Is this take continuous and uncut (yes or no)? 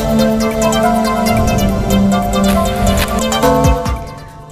yes